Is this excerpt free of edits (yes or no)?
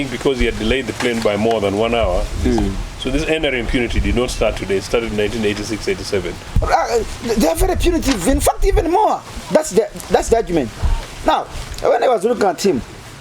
no